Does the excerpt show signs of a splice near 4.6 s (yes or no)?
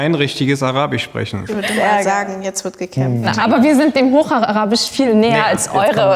no